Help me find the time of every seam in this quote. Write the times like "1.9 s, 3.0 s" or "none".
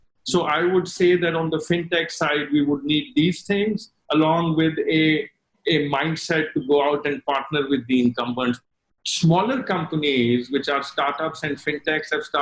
8.6 s